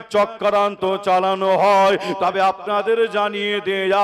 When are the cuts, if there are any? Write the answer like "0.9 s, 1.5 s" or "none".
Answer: none